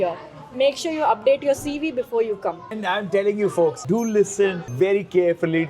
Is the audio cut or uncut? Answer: cut